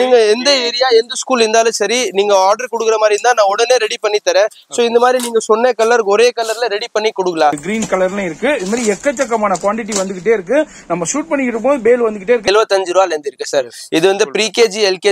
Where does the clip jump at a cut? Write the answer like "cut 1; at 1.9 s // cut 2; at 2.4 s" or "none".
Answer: cut 1; at 7.6 s // cut 2; at 12.5 s

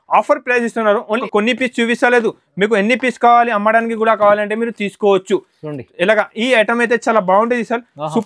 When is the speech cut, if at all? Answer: cut 1; at 1.0 s

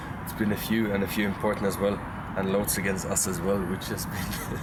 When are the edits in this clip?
none

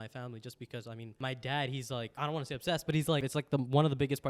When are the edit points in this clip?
cut 1; at 1.1 s // cut 2; at 2.1 s // cut 3; at 3.3 s

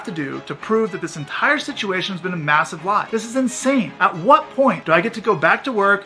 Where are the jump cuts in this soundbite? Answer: cut 1; at 3.1 s // cut 2; at 3.9 s // cut 3; at 4.8 s

